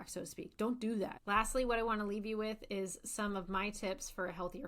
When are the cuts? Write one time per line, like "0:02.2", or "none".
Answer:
0:01.2